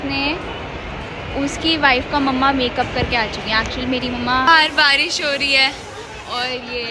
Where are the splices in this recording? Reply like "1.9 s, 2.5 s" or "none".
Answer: 4.5 s